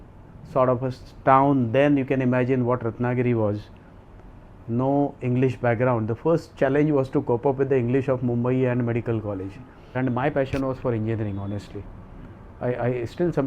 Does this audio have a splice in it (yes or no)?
yes